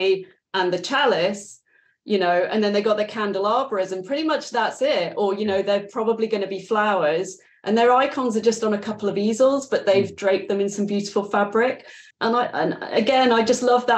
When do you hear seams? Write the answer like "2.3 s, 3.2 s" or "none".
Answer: 12.0 s

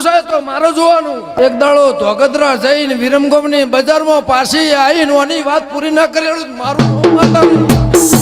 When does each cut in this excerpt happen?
1.3 s

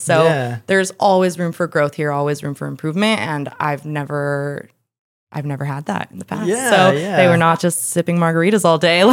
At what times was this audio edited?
7.1 s

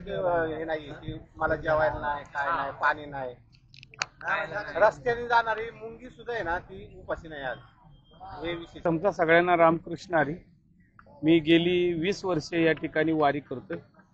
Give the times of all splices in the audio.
8.8 s

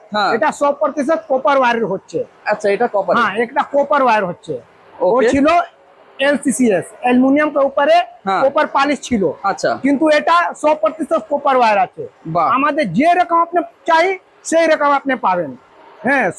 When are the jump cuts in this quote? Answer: none

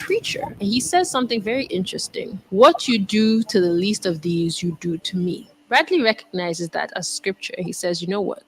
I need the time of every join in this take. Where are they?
7.1 s

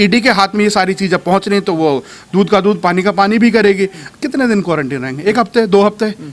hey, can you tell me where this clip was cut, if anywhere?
4.0 s

